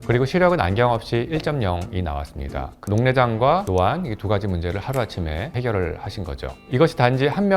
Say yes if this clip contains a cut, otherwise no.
yes